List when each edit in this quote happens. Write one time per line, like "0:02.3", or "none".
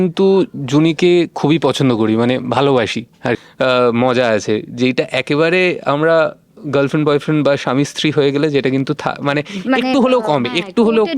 0:03.5